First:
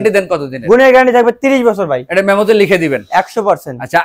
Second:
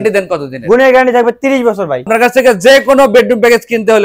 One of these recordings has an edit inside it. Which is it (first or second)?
second